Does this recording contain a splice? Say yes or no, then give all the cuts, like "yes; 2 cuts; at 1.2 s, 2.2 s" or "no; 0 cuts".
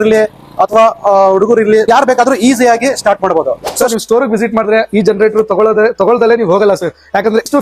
yes; 1 cut; at 3.7 s